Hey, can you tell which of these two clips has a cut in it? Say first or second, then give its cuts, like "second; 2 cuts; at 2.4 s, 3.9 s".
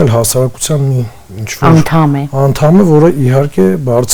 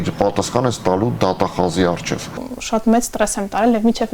second; 1 cut; at 2.4 s